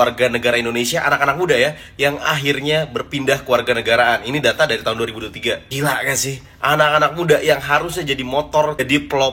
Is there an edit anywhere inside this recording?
no; 0 cuts

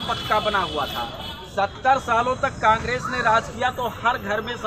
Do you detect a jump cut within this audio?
no; 0 cuts

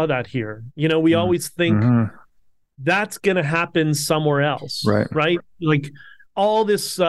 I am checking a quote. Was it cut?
no; 0 cuts

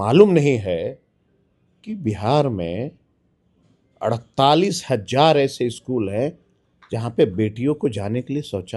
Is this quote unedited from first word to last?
yes; 0 cuts

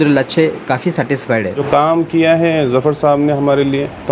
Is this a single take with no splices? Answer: no; 1 cut; at 1.6 s

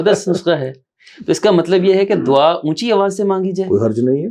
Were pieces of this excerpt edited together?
no; 0 cuts

